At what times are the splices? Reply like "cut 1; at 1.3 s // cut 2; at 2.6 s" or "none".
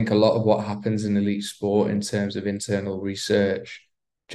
none